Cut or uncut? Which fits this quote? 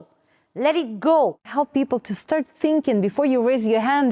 cut